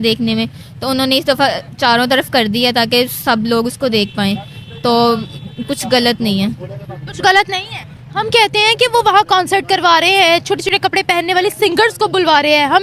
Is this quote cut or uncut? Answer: uncut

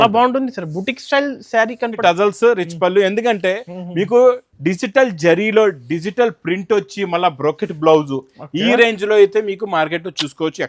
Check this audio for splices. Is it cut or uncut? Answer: cut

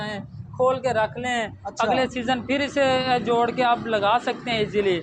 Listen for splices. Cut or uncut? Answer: uncut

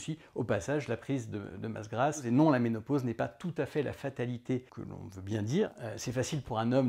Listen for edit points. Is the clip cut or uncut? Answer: cut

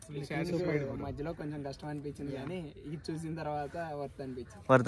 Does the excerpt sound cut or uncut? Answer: uncut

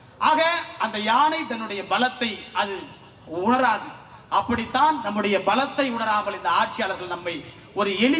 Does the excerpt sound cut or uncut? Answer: uncut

